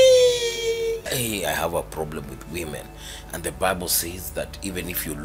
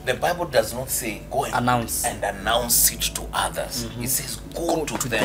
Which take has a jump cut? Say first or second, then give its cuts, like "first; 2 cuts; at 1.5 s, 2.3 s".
first; 1 cut; at 1.1 s